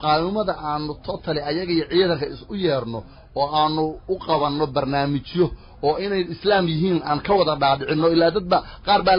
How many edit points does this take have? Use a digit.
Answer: 0